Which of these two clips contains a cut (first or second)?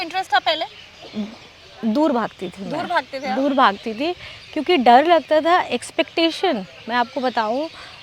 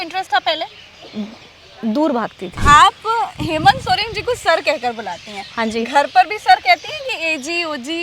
second